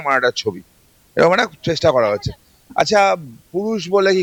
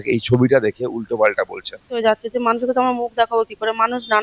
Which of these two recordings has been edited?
second; 1 cut; at 2.0 s

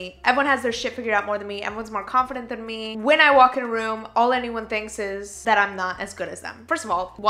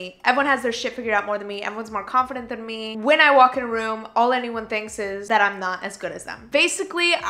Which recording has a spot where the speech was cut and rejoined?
second; 2 cuts; at 5.2 s, 6.3 s

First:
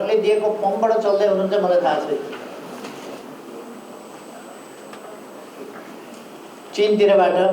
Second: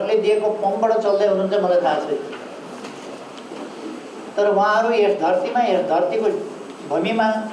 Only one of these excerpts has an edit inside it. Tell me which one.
first; 1 cut; at 3.2 s

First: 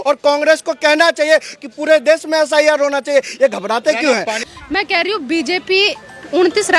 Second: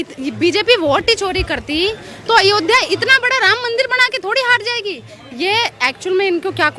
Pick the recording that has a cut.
first; 1 cut; at 4.4 s

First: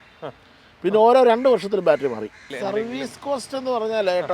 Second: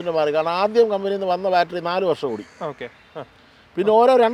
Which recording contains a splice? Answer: first; 1 cut; at 2.4 s

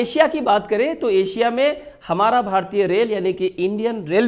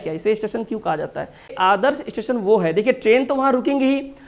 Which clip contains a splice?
second; 1 cut; at 1.5 s

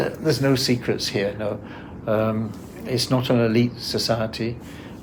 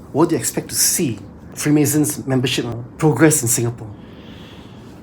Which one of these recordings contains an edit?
second; 2 cuts; at 1.5 s, 2.8 s

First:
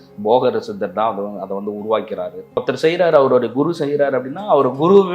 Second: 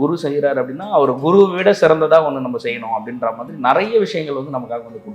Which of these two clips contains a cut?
first; 1 cut; at 2.6 s

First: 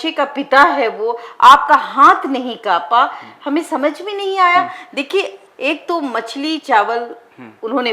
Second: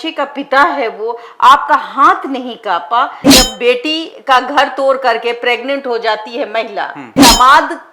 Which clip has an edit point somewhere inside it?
second; 2 cuts; at 3.2 s, 7.2 s

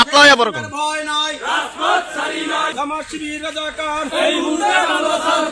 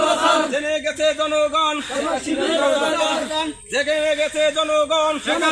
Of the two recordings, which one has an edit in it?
first; 1 cut; at 2.7 s

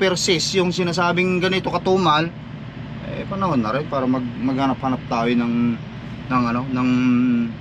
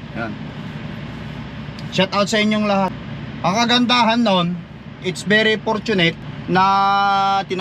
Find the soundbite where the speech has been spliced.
second; 2 cuts; at 3.0 s, 6.3 s

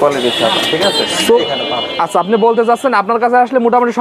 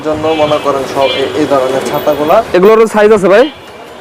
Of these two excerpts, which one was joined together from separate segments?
first; 1 cut; at 1.4 s

